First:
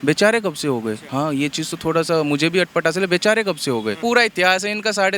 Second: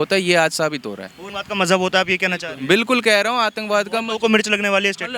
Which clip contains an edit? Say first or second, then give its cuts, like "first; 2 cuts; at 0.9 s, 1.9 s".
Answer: first; 2 cuts; at 1.0 s, 4.0 s